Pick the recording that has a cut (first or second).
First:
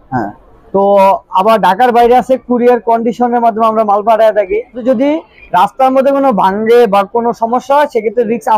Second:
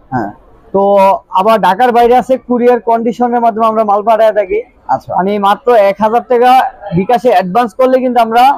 first